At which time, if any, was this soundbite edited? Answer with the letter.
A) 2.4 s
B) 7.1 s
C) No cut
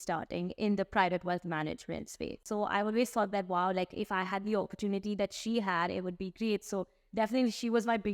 A